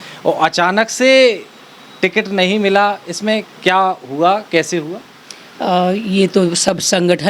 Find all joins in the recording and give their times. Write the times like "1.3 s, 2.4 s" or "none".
none